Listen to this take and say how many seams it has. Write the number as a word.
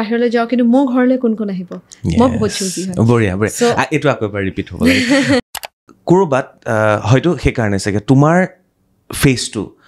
one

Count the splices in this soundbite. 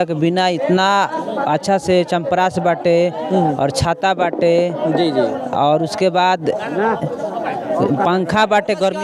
zero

